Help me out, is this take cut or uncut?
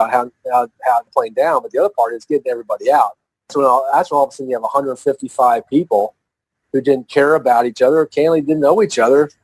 cut